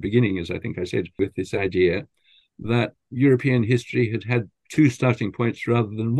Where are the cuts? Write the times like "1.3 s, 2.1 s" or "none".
1.2 s, 3.0 s, 4.6 s